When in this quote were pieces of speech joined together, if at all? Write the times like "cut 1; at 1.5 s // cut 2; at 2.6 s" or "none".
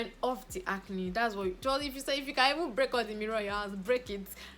none